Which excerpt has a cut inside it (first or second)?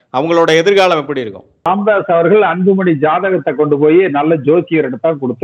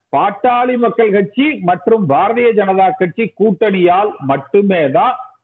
first